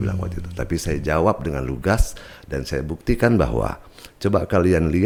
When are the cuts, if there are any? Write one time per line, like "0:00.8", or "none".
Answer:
none